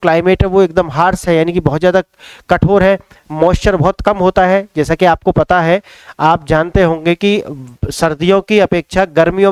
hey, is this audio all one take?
yes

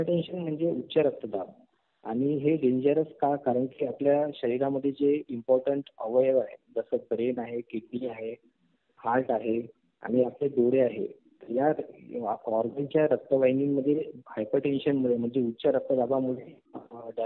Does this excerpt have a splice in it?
no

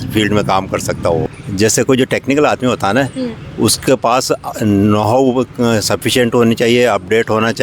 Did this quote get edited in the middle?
yes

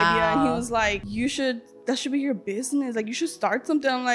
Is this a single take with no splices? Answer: no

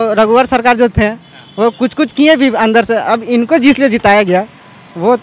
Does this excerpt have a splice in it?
no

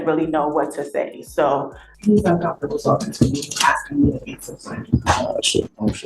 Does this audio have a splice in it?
yes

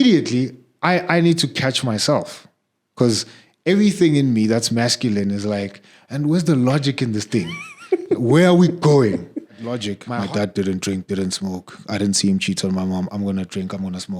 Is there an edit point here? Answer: yes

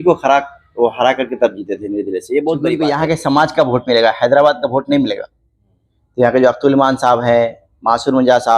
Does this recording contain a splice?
yes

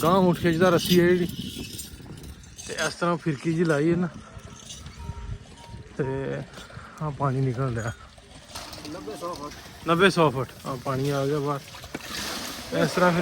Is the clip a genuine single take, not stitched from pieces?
no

